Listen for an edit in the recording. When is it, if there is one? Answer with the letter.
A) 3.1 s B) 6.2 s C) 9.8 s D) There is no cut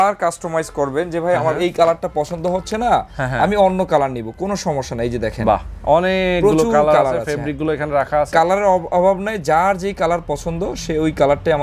D